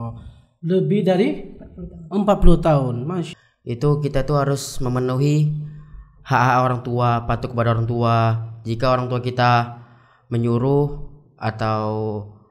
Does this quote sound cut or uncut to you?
cut